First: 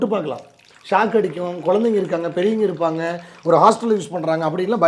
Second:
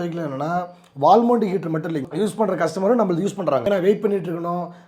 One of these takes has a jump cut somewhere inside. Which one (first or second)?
second